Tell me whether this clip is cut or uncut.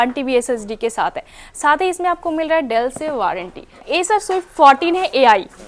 cut